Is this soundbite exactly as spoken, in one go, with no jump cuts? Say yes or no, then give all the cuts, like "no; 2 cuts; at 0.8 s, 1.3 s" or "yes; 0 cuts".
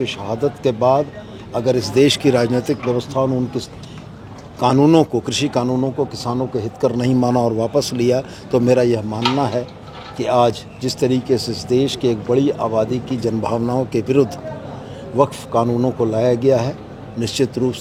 yes; 0 cuts